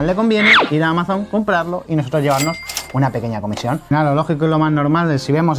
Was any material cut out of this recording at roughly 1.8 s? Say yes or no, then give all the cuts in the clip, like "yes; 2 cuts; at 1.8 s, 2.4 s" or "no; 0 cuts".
no; 1 cut; at 3.9 s